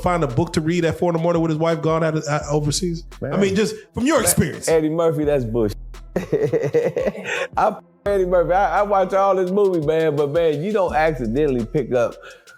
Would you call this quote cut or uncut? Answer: uncut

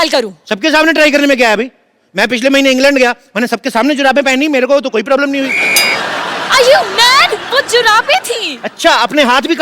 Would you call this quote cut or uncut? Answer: uncut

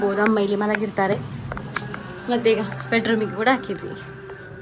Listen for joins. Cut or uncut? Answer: uncut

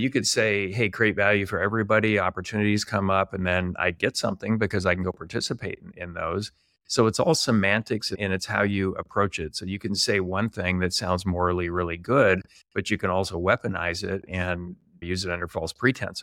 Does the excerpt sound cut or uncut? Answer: uncut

